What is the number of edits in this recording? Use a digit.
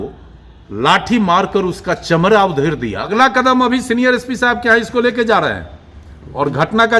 1